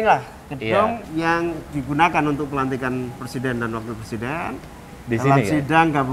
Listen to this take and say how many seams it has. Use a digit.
1